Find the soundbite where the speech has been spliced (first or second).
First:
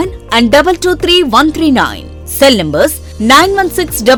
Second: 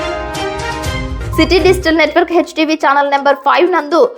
second